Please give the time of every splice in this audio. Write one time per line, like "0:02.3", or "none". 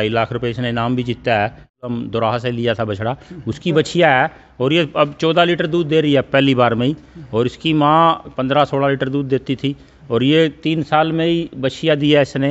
0:01.9